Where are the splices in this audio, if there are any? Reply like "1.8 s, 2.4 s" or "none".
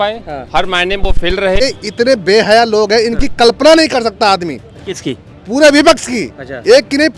1.9 s